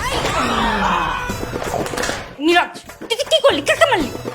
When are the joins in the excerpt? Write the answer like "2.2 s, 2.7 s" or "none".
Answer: 2.3 s